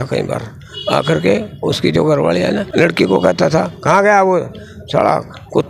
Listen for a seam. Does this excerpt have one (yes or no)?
yes